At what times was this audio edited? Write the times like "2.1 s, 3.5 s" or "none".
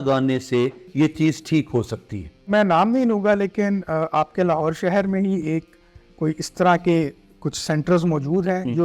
2.5 s